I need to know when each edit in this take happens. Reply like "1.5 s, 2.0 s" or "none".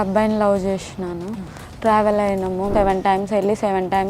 2.7 s

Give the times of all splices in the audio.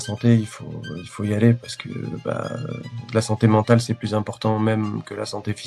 none

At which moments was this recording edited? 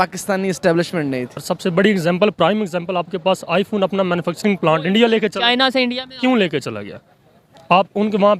1.4 s

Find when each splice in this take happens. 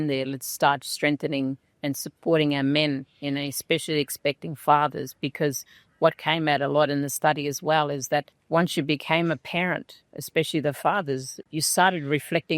11.4 s

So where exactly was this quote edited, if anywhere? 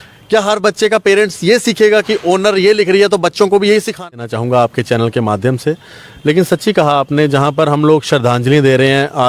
4.2 s

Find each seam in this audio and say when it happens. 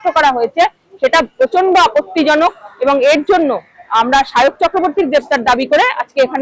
none

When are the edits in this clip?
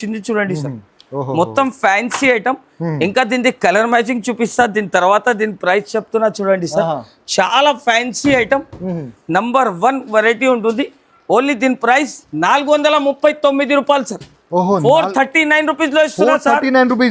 none

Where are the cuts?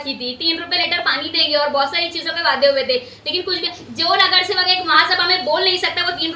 none

